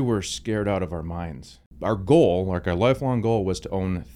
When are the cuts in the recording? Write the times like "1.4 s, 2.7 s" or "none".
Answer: 1.6 s